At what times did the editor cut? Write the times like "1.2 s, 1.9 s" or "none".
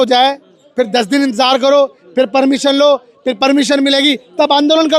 none